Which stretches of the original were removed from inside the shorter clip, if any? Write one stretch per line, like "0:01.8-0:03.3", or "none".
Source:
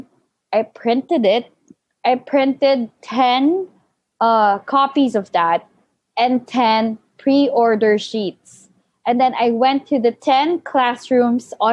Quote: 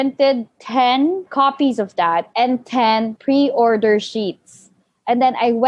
0:03.7-0:04.6
0:05.7-0:06.1
0:07.0-0:07.1